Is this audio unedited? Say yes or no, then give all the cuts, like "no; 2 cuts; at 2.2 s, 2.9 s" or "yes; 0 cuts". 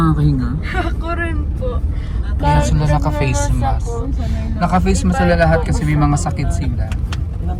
yes; 0 cuts